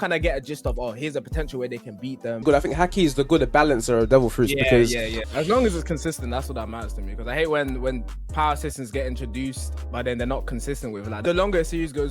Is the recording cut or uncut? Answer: cut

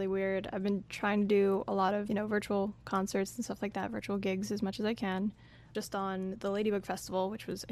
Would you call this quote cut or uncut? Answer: cut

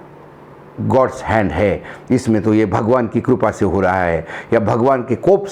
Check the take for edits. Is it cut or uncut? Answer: uncut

